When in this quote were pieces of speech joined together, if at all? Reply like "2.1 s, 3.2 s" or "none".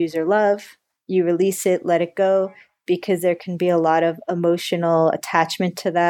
none

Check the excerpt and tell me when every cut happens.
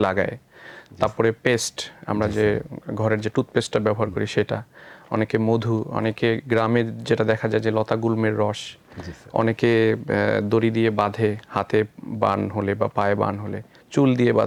none

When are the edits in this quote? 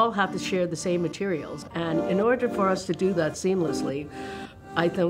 1.6 s

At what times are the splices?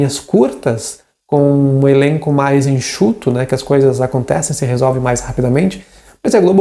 none

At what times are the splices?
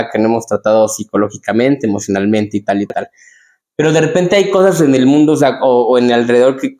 none

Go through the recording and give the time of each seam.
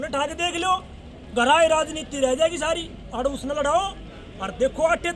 none

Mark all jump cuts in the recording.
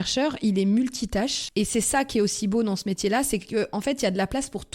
1.4 s

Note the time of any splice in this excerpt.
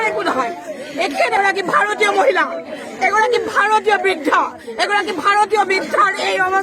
1.3 s

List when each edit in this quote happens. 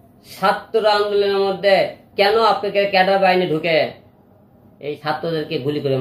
5.0 s

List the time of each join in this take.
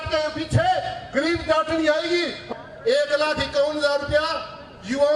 2.4 s

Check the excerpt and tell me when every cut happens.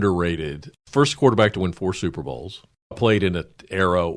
0.8 s, 3.0 s

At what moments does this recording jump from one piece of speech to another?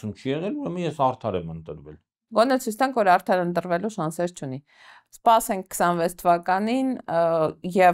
none

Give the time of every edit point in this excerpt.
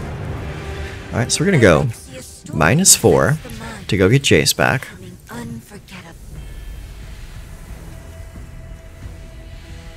6.1 s

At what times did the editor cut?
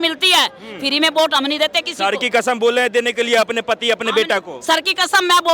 none

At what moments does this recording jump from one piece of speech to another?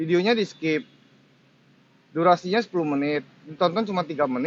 none

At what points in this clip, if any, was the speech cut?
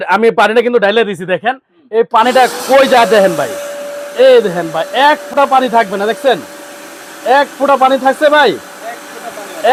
none

